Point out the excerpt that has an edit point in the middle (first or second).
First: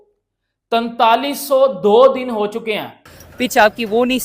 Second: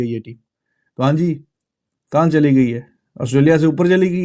first